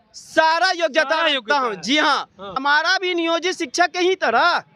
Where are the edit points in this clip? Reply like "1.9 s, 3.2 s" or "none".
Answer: 2.6 s